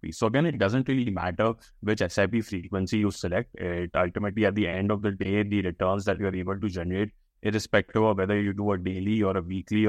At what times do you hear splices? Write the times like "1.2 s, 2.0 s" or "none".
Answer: none